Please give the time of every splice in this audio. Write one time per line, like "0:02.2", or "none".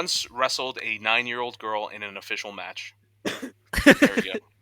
0:03.4